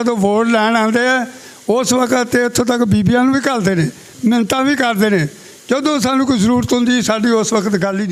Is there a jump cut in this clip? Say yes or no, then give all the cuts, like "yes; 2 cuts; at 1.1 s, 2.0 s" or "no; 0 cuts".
no; 0 cuts